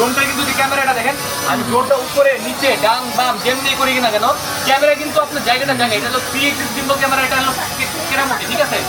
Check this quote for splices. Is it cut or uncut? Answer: uncut